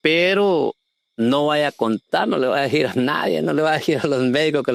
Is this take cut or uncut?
uncut